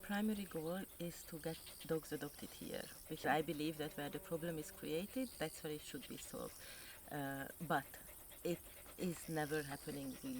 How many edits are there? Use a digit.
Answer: 0